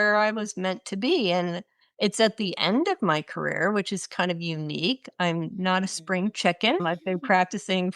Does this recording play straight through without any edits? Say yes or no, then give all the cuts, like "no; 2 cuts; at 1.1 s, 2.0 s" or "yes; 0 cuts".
no; 1 cut; at 6.8 s